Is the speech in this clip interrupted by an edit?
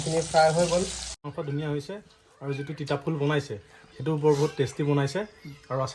yes; 1 cut; at 1.1 s

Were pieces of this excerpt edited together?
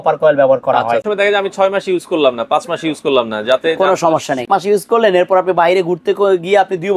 yes; 2 cuts; at 1.1 s, 4.4 s

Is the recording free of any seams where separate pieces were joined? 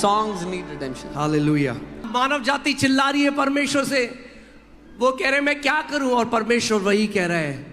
no; 1 cut; at 2.0 s

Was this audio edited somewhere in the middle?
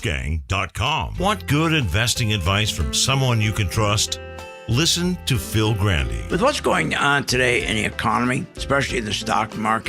yes; 1 cut; at 1.0 s

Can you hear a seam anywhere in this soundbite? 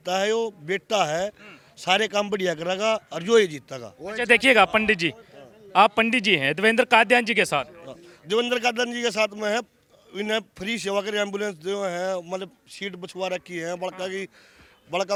no; 0 cuts

